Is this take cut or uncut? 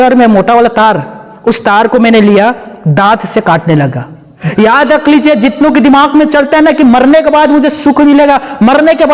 cut